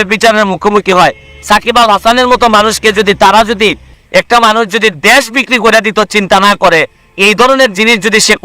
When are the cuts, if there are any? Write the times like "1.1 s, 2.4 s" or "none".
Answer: 3.9 s